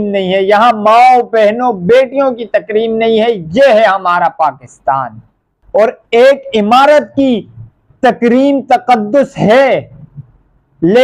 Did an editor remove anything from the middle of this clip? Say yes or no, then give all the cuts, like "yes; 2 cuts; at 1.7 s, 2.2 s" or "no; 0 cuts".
yes; 1 cut; at 5.5 s